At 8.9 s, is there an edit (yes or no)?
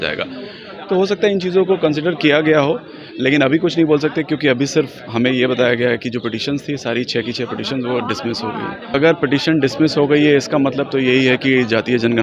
yes